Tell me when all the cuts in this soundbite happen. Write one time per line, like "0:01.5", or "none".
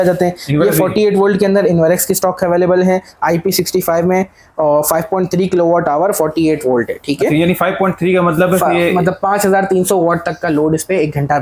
none